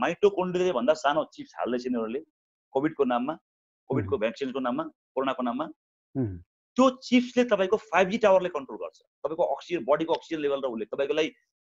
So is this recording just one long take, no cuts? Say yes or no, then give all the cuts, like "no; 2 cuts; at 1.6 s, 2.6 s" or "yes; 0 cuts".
yes; 0 cuts